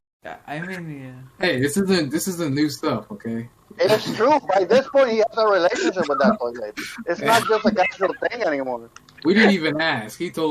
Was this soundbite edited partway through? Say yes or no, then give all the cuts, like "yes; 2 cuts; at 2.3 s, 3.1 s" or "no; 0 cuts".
no; 0 cuts